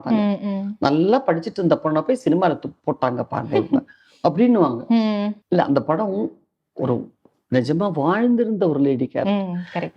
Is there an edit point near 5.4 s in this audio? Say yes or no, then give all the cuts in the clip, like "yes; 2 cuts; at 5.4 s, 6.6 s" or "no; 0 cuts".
yes; 1 cut; at 5.4 s